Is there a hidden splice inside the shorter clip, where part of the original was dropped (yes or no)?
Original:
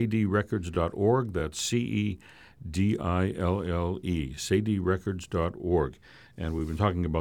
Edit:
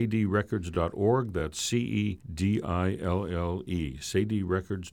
yes